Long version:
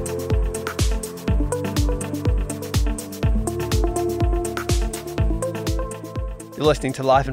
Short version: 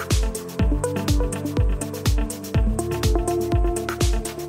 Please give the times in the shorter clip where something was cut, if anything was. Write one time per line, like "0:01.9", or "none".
none